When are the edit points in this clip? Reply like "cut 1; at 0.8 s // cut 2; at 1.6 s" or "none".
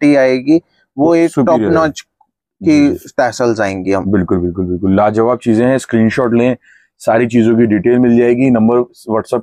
none